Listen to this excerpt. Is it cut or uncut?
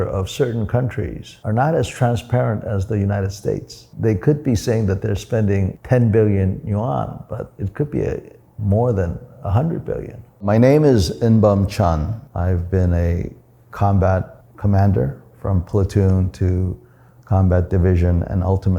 cut